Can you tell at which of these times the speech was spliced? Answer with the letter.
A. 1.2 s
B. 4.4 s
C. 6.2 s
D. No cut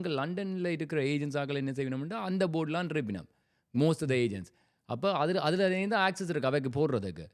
D